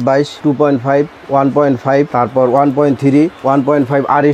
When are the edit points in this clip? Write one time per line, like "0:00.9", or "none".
none